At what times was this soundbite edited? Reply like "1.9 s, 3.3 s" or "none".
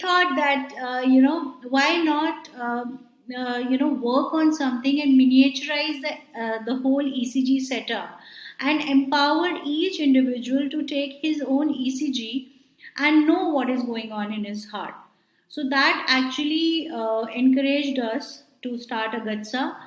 none